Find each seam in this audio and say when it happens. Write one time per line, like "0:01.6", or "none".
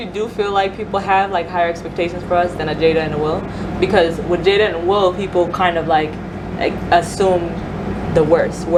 none